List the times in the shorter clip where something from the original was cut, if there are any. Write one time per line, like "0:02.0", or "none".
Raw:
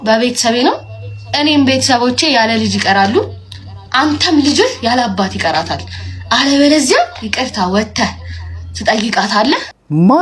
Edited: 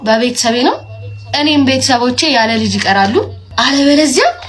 0:03.4